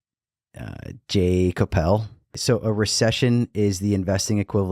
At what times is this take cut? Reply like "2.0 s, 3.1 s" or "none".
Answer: 2.4 s